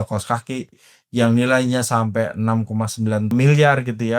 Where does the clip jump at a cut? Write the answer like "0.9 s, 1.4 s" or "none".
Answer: 3.3 s